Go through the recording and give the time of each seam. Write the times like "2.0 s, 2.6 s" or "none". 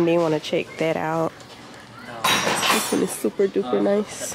1.4 s